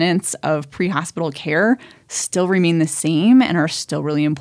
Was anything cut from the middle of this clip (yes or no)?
no